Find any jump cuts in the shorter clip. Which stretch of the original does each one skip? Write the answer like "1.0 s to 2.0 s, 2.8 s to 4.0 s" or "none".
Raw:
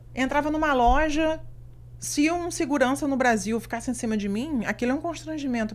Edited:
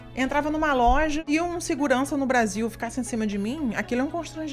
1.2 s to 2.1 s